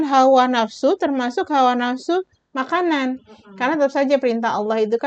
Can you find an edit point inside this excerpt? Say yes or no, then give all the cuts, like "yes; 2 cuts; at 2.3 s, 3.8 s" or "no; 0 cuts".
no; 0 cuts